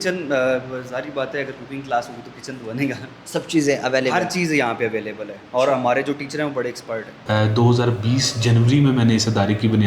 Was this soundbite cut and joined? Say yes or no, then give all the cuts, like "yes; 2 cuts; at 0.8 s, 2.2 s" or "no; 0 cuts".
yes; 1 cut; at 7.1 s